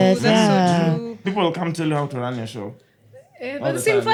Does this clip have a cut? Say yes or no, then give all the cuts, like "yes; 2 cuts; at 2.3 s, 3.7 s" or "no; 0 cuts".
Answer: no; 0 cuts